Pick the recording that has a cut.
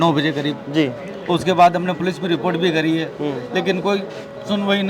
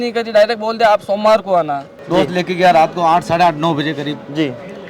second; 1 cut; at 2.0 s

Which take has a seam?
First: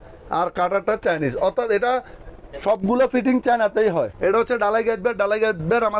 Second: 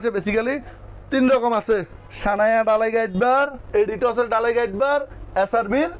first; 1 cut; at 4.1 s

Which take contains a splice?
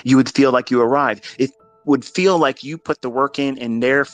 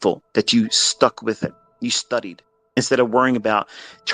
second; 2 cuts; at 1.7 s, 2.8 s

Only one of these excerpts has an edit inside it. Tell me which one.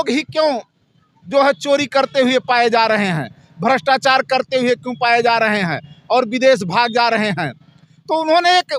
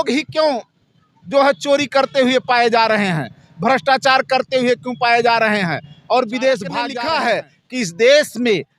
second; 1 cut; at 6.9 s

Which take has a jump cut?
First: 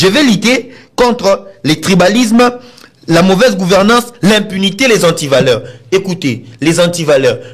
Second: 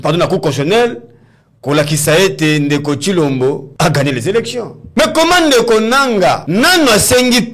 second; 3 cuts; at 3.7 s, 4.8 s, 6.4 s

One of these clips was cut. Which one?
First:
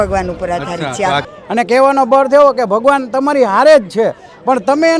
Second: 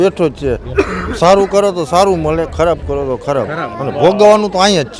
first; 1 cut; at 1.2 s

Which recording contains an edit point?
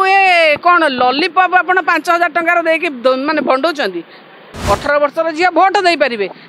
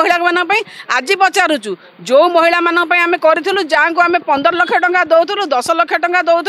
first; 1 cut; at 4.5 s

